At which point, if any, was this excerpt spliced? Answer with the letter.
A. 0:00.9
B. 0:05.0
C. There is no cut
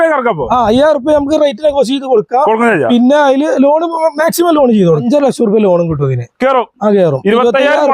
B